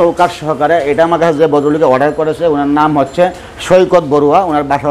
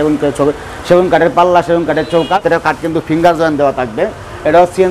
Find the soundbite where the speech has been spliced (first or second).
second